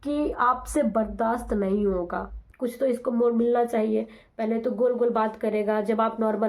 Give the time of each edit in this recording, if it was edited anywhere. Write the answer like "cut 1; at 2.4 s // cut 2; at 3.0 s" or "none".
cut 1; at 2.4 s